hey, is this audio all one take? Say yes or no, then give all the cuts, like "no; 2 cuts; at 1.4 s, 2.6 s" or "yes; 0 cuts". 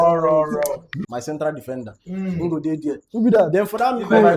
no; 1 cut; at 1.0 s